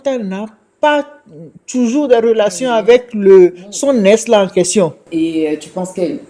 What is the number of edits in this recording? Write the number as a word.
zero